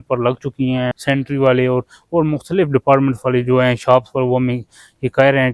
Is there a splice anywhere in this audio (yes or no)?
yes